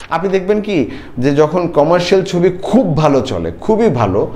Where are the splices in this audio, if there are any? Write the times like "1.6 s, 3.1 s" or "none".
none

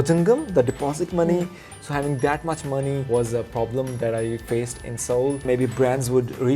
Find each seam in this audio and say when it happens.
5.4 s

